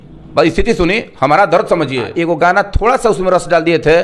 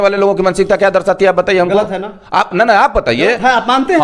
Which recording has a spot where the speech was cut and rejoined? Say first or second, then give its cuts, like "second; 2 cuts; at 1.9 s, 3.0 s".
first; 1 cut; at 2.1 s